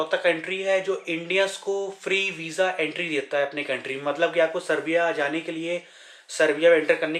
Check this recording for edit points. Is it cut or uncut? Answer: uncut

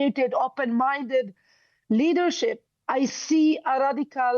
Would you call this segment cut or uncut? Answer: cut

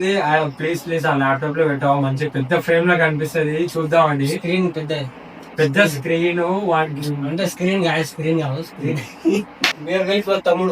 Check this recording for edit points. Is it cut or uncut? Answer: cut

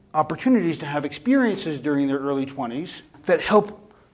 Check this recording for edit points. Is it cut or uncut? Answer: cut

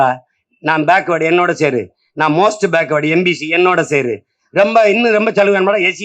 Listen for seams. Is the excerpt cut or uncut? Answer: uncut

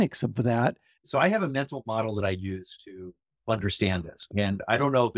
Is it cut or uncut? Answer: cut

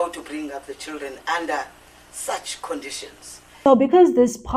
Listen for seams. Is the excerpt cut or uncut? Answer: uncut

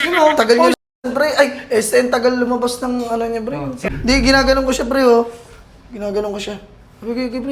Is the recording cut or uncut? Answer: cut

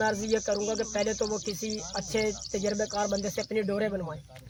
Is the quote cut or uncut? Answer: uncut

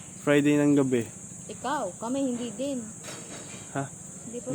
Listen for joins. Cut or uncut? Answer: uncut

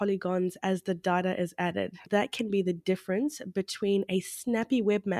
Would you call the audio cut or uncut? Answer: cut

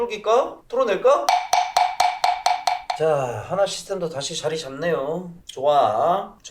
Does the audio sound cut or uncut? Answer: cut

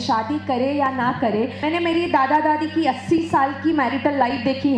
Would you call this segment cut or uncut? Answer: uncut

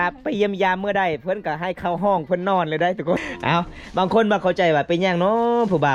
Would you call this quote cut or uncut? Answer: cut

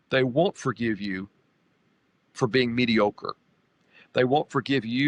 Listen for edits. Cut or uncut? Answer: uncut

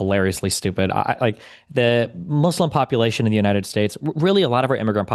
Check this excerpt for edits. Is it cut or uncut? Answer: uncut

